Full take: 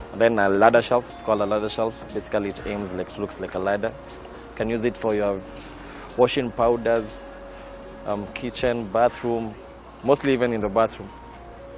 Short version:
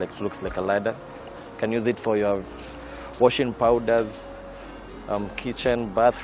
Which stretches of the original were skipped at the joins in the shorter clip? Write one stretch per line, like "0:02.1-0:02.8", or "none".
none